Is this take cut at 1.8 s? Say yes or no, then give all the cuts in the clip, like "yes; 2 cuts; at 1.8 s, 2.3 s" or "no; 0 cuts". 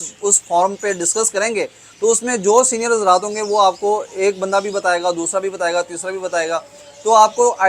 no; 0 cuts